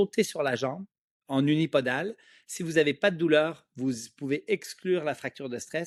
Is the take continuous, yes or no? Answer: yes